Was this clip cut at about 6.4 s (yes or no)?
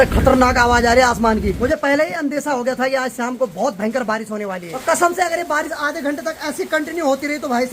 no